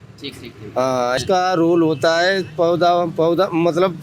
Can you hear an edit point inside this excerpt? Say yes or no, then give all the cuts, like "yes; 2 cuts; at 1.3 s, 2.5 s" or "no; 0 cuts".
yes; 1 cut; at 1.2 s